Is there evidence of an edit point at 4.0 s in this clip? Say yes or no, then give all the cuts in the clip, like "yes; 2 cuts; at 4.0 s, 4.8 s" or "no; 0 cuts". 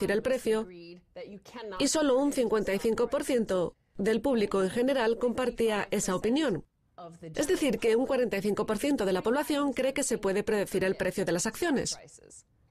no; 1 cut; at 7.0 s